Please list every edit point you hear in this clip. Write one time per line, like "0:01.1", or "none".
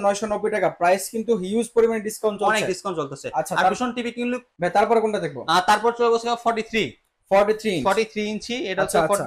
none